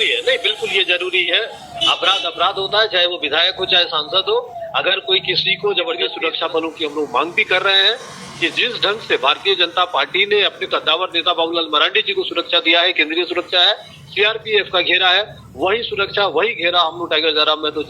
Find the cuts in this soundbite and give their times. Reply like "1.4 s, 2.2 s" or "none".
6.1 s